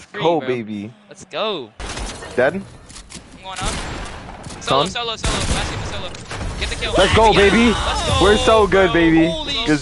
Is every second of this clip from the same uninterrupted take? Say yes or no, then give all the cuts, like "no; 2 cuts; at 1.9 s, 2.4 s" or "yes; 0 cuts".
no; 1 cut; at 1.8 s